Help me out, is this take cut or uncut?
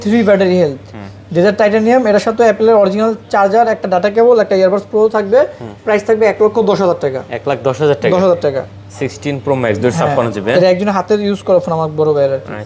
uncut